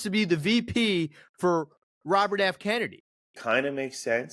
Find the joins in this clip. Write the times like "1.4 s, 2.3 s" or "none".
3.3 s